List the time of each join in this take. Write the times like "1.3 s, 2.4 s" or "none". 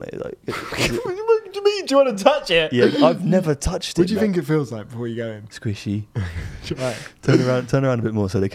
3.8 s